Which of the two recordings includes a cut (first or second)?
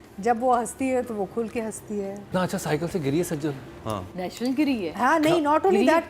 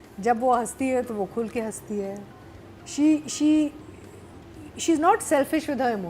first